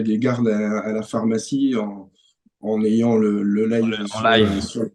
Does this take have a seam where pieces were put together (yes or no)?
no